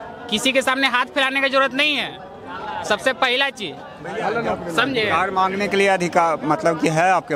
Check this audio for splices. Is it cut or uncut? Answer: uncut